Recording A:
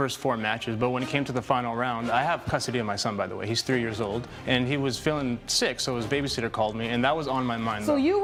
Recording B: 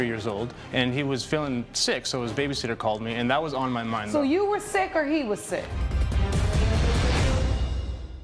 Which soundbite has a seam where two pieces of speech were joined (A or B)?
B